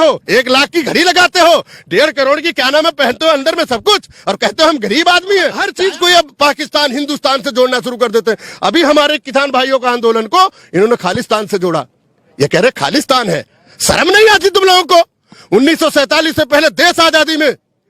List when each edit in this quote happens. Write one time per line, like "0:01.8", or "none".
0:05.6